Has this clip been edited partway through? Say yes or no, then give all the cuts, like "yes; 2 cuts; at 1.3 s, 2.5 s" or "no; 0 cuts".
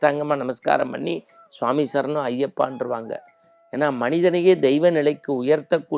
no; 0 cuts